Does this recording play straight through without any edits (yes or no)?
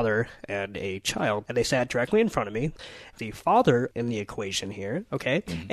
no